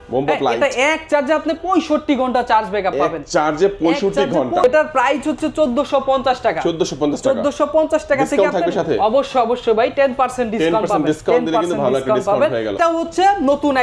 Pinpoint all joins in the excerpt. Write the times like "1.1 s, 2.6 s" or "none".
4.6 s, 12.7 s